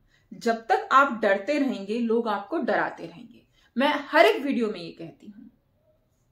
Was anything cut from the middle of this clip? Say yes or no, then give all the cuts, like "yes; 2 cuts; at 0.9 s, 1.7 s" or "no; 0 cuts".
no; 0 cuts